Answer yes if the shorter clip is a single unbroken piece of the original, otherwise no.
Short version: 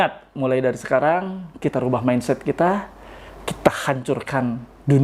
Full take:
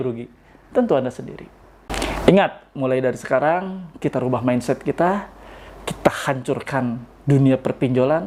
yes